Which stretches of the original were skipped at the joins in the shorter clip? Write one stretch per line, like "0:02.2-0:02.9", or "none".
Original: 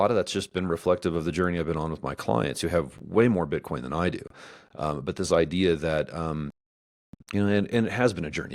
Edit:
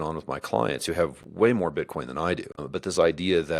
0:04.4-0:05.0